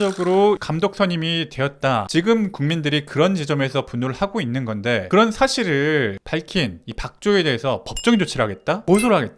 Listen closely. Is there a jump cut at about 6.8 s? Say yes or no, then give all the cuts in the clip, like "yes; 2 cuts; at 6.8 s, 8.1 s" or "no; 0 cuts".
no; 1 cut; at 2.1 s